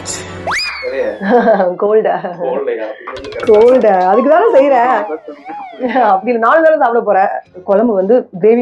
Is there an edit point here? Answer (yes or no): yes